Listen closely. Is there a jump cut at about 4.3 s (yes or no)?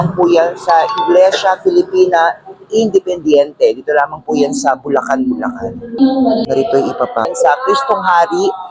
no